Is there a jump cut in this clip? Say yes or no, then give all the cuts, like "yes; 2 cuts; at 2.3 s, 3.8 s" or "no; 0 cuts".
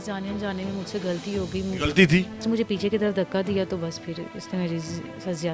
yes; 1 cut; at 2.4 s